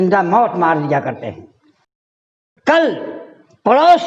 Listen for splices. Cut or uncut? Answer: cut